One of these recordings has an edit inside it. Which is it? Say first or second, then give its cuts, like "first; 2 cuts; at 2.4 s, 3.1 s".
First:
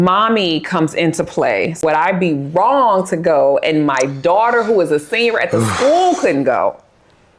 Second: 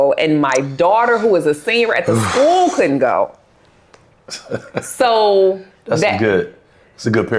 first; 1 cut; at 1.7 s